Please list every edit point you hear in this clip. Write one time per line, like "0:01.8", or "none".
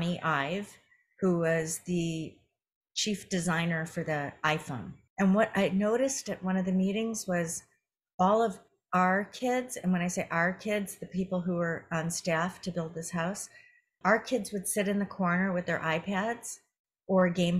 0:05.0